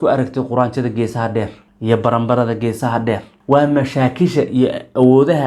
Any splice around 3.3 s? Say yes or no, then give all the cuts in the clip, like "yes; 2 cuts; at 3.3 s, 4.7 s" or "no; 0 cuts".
yes; 2 cuts; at 1.6 s, 3.3 s